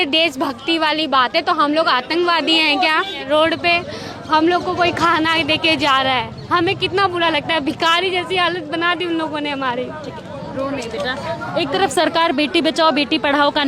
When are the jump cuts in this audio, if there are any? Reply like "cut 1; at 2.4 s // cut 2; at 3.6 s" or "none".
cut 1; at 3.2 s